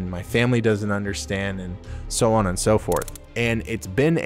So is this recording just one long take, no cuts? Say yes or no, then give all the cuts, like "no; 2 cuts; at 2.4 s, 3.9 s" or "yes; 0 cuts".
no; 1 cut; at 3.2 s